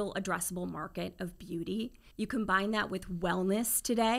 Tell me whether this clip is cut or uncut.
cut